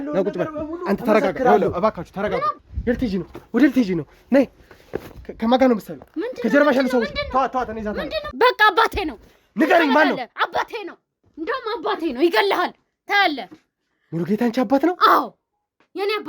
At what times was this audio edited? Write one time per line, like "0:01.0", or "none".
0:02.5
0:08.2